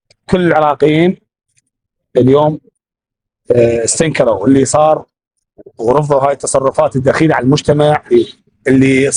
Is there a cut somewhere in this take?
no; 0 cuts

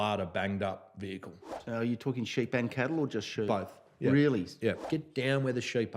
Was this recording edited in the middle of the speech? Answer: yes; 2 cuts; at 1.6 s, 4.8 s

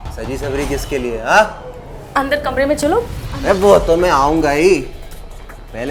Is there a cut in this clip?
no; 0 cuts

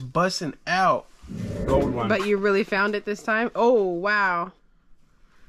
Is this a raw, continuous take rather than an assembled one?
no; 1 cut; at 1.5 s

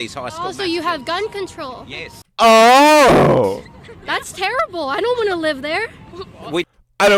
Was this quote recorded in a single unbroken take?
yes; 0 cuts

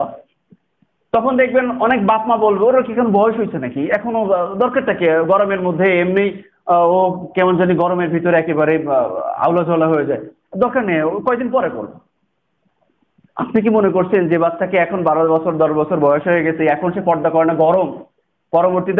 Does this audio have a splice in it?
no; 0 cuts

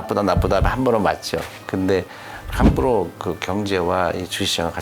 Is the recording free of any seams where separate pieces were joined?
no; 1 cut; at 1.6 s

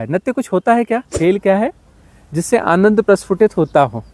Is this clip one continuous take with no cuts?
no; 1 cut; at 1.1 s

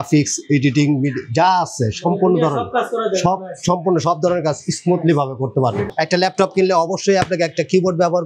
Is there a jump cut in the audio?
yes; 1 cut; at 5.8 s

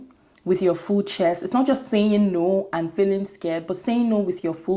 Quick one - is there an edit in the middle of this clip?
no; 0 cuts

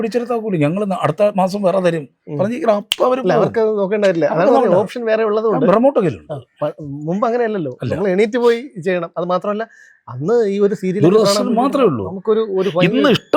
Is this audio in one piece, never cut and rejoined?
yes; 0 cuts

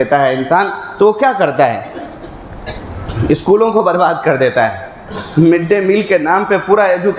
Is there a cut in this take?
no; 0 cuts

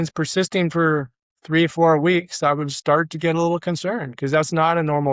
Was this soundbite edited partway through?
no; 0 cuts

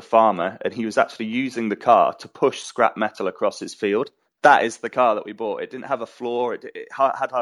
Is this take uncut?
no; 1 cut; at 4.3 s

